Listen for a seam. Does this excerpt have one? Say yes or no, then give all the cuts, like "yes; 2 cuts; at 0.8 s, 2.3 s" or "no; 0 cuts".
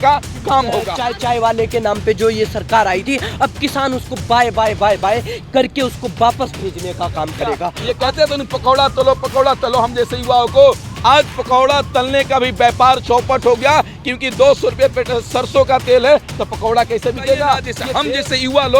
yes; 3 cuts; at 0.9 s, 7.8 s, 17.8 s